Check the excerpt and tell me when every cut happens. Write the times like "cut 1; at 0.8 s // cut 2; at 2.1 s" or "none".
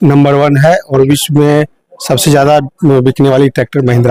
none